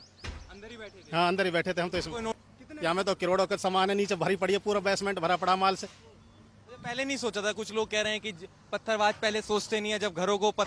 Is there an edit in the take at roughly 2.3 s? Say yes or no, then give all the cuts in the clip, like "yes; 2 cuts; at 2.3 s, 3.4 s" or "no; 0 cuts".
yes; 1 cut; at 2.3 s